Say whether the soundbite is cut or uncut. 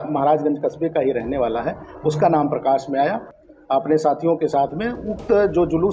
cut